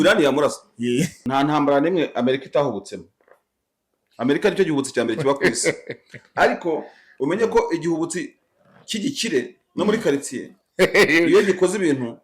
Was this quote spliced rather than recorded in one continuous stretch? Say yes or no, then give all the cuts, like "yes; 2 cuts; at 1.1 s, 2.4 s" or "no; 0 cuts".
yes; 1 cut; at 1.2 s